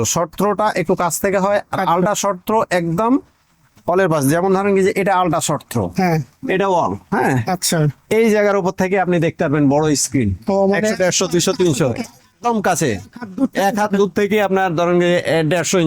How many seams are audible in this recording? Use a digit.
0